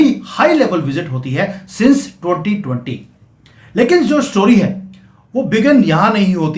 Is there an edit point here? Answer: no; 0 cuts

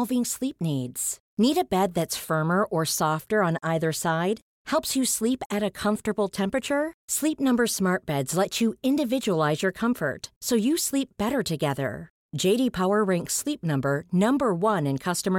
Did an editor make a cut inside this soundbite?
no; 0 cuts

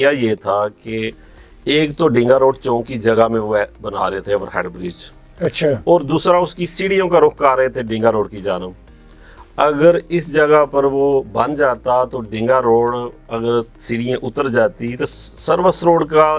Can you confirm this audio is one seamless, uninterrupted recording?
yes; 0 cuts

